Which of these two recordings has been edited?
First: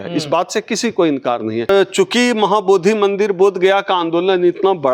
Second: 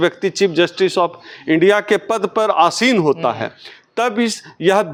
first; 1 cut; at 1.7 s

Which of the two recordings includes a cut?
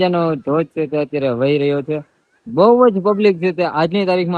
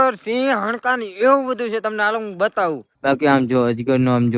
second; 1 cut; at 2.9 s

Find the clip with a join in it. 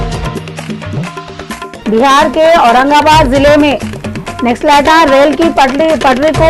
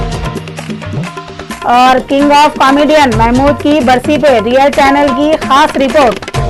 first; 1 cut; at 1.0 s

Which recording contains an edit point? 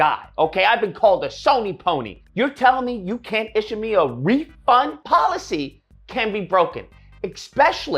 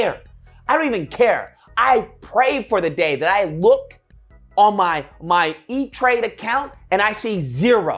first; 2 cuts; at 2.1 s, 5.0 s

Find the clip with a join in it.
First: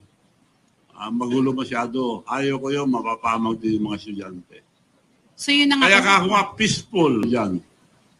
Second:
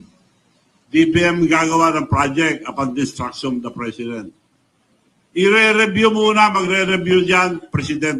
first; 1 cut; at 7.2 s

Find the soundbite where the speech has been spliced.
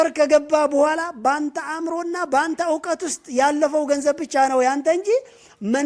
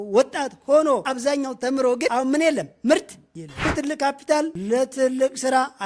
second; 3 cuts; at 1.1 s, 2.1 s, 3.7 s

